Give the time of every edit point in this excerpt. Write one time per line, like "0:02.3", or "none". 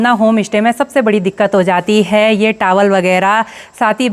none